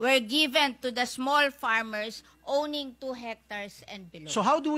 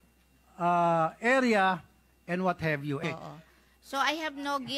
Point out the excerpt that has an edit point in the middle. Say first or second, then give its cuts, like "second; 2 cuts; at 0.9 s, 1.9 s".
second; 1 cut; at 3.0 s